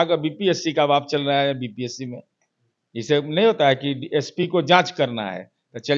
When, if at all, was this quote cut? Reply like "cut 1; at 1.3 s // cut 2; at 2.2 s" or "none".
none